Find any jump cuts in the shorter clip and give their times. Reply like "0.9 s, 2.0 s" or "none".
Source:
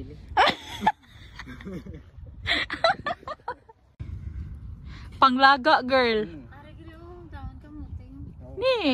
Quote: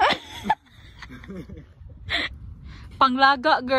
2.3 s